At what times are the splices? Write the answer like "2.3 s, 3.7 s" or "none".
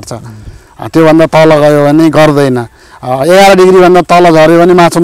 none